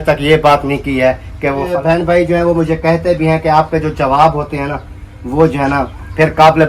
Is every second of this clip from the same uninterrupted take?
no; 1 cut; at 1.7 s

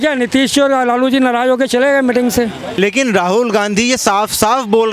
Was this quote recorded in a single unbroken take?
no; 1 cut; at 2.8 s

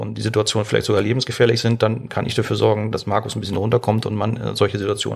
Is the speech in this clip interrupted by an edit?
no; 0 cuts

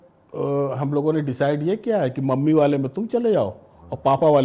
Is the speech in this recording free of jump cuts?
yes; 0 cuts

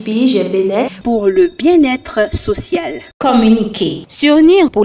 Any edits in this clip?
yes; 1 cut; at 3.0 s

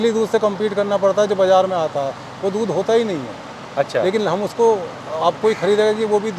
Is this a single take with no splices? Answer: yes; 0 cuts

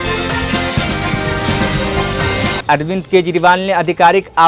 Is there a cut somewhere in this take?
yes; 1 cut; at 2.6 s

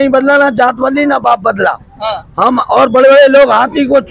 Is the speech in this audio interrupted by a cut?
no; 0 cuts

